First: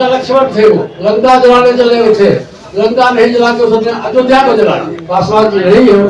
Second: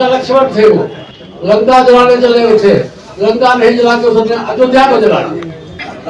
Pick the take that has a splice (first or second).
first